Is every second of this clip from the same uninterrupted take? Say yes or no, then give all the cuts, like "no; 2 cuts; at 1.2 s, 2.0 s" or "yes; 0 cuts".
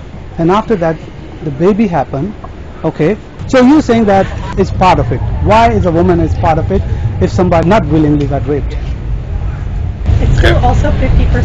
no; 3 cuts; at 3.4 s, 4.5 s, 7.6 s